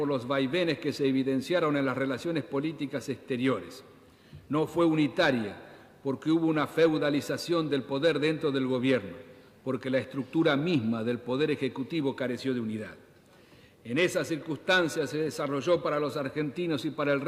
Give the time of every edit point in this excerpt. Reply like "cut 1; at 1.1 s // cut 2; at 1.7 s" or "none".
none

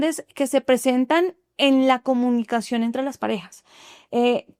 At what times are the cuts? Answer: none

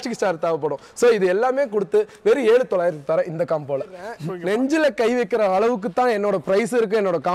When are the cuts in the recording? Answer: cut 1; at 4.1 s

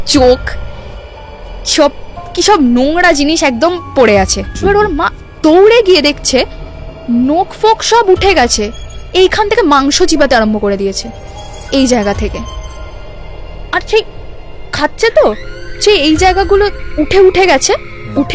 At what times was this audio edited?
cut 1; at 4.5 s

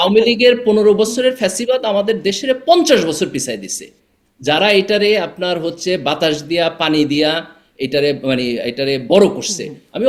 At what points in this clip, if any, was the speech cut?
none

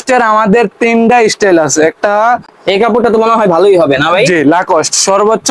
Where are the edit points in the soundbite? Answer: none

